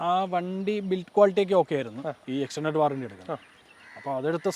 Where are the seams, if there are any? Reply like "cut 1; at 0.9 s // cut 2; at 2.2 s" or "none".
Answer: cut 1; at 2.1 s